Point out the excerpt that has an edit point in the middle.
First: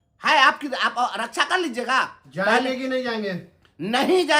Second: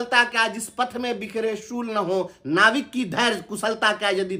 first; 1 cut; at 2.2 s

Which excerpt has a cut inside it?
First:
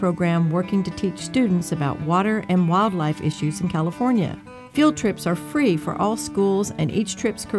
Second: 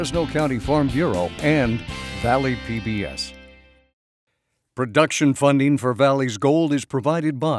second; 1 cut; at 3.2 s

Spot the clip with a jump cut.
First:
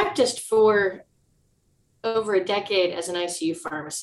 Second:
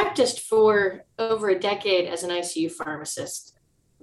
second; 1 cut; at 1.1 s

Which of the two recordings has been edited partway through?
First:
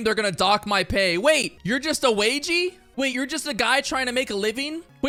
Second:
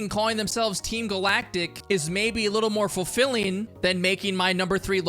second; 2 cuts; at 1.8 s, 3.7 s

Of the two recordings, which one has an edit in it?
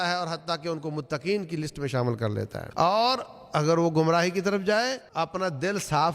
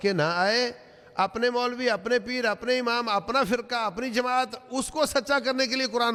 first; 2 cuts; at 2.6 s, 5.0 s

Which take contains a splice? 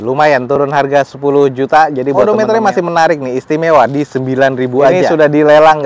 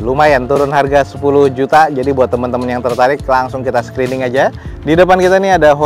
first; 2 cuts; at 2.2 s, 5.0 s

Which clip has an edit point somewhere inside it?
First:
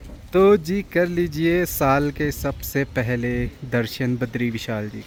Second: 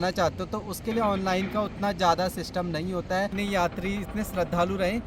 second; 1 cut; at 3.3 s

